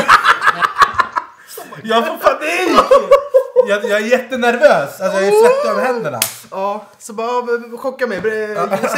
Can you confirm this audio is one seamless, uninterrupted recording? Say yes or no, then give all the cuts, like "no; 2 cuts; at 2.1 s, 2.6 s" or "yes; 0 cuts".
yes; 0 cuts